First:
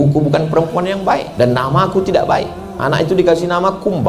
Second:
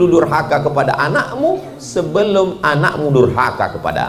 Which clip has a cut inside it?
first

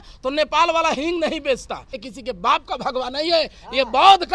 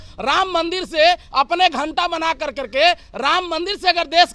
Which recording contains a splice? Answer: first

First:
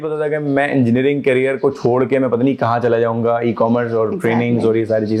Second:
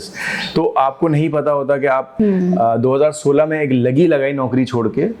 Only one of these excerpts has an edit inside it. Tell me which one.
second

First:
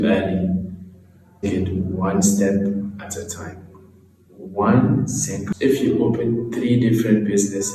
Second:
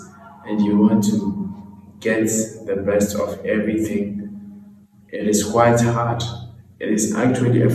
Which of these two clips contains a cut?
first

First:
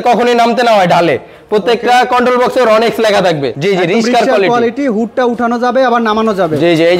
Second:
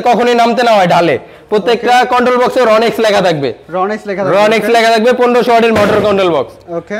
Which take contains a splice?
first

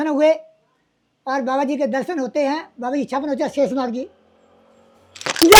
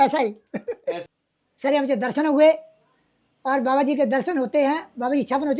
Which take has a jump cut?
second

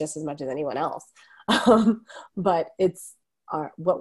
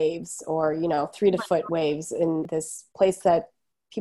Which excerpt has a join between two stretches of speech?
second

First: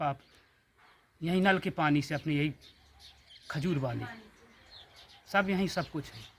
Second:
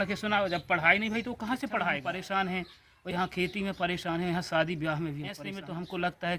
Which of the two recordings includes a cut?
second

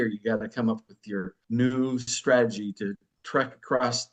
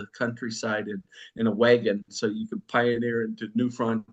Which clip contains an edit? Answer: first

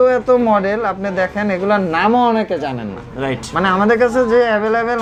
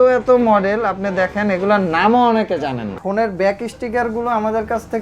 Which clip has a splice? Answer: second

